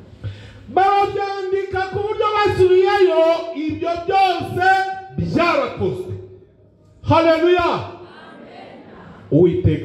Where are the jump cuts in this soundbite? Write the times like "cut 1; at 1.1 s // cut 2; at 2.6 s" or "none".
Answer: none